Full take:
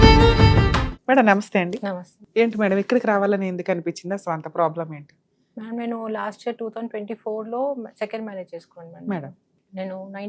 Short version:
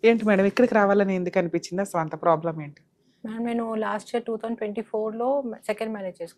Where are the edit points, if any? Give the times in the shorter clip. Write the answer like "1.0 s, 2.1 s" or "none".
none